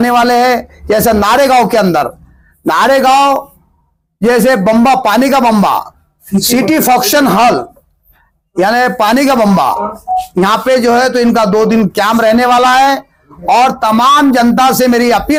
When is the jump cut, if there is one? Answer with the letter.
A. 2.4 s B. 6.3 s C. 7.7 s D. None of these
D